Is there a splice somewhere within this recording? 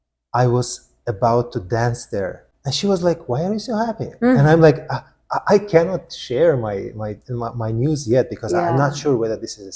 no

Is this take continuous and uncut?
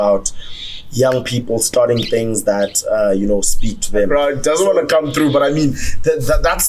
no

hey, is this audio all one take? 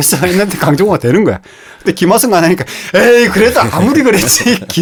yes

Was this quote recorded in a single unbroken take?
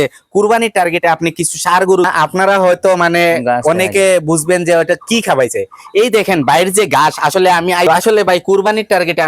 no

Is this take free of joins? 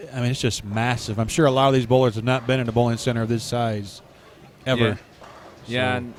yes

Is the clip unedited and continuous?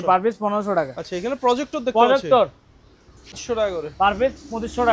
no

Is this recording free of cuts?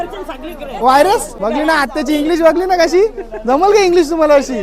no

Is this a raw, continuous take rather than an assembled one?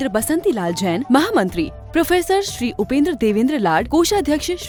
yes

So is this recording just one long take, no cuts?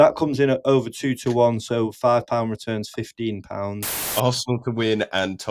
no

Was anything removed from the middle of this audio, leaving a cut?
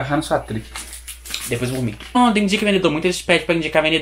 yes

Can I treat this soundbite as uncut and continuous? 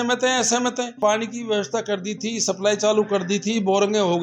no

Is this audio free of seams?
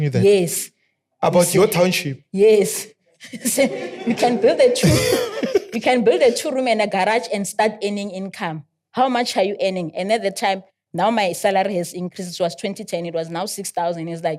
yes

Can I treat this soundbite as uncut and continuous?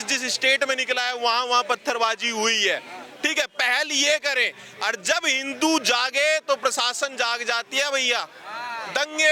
yes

